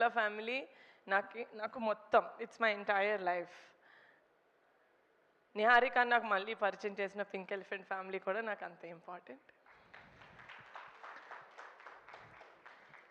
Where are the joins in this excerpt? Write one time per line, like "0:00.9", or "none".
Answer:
none